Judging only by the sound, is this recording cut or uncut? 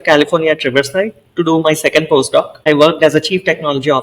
cut